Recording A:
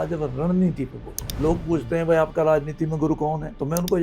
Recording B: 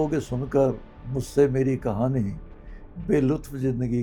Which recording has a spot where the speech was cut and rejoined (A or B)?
A